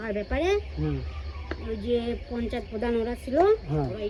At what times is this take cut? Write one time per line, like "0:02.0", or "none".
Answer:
none